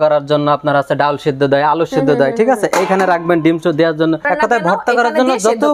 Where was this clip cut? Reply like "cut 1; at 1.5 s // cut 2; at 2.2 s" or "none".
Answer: cut 1; at 4.3 s